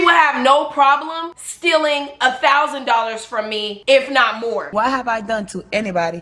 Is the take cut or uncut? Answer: cut